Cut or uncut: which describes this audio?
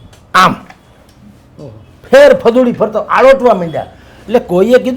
uncut